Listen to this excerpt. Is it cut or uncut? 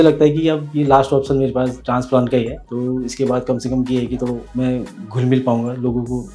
cut